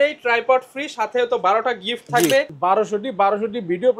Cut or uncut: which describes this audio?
cut